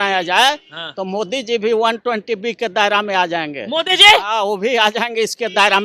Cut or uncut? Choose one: uncut